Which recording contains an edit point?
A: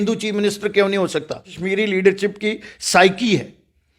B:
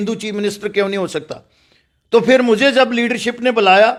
A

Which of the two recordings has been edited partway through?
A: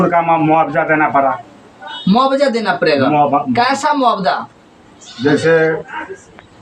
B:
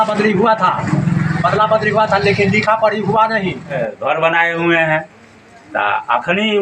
B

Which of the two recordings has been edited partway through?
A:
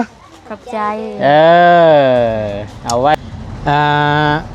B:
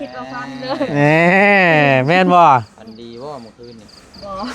A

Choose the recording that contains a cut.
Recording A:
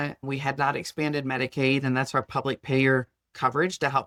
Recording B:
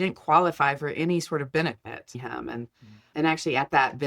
B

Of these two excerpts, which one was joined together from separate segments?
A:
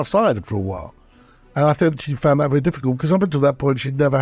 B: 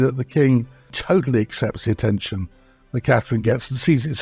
B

